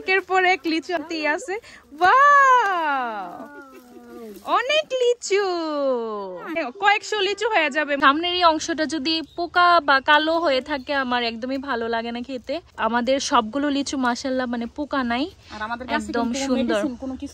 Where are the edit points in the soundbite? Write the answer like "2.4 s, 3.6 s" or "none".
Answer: 1.1 s, 6.6 s, 8.0 s, 12.7 s

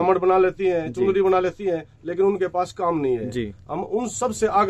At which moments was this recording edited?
none

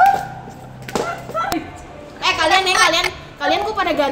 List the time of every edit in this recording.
1.6 s

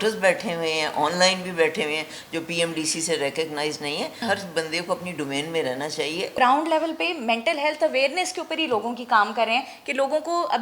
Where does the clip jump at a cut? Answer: 4.2 s, 6.3 s

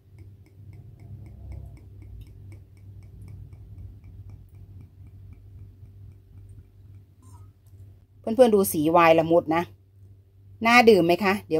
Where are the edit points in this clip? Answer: 8.1 s

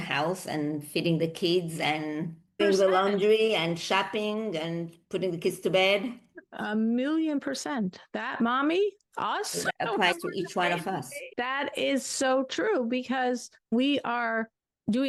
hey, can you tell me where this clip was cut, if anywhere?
none

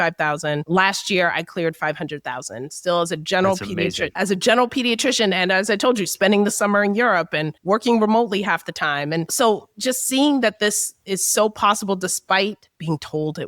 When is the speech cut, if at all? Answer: 9.3 s

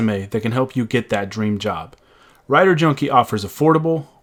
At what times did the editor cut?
none

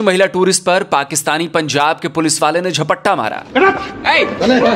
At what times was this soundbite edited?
none

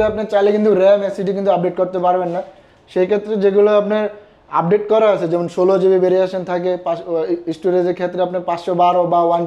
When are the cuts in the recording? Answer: none

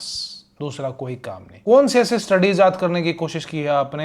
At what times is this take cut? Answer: 1.5 s

